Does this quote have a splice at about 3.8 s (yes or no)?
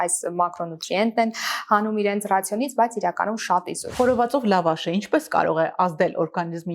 yes